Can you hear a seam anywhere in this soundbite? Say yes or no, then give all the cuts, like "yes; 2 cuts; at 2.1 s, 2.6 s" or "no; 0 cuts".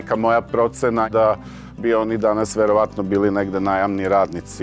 yes; 1 cut; at 1.1 s